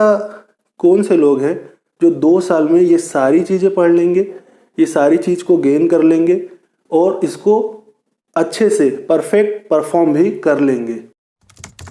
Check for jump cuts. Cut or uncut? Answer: uncut